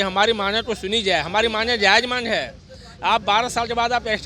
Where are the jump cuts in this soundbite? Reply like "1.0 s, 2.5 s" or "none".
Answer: none